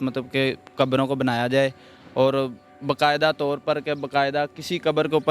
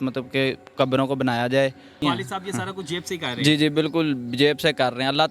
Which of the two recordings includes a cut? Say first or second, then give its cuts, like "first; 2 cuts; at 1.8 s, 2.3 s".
second; 1 cut; at 2.0 s